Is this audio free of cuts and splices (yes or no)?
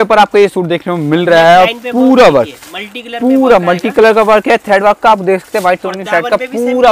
yes